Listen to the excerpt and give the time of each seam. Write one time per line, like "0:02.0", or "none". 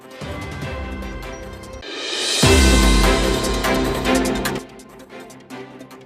none